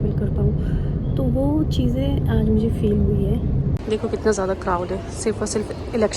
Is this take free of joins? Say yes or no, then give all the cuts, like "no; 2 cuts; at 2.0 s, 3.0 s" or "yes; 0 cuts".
no; 1 cut; at 3.8 s